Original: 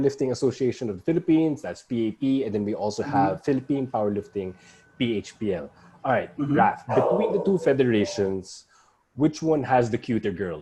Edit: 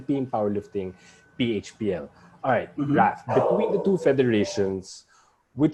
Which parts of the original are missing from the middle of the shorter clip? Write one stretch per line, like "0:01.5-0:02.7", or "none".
none